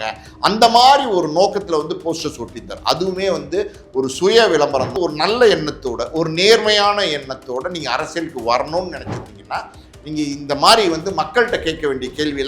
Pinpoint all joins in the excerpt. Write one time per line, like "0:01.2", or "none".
0:04.9